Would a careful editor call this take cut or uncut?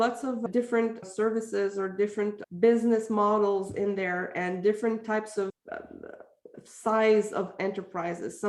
uncut